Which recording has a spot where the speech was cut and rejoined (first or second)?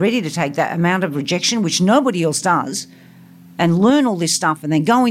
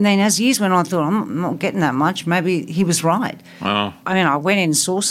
second